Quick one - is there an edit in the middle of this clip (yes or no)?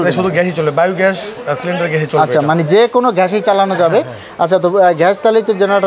no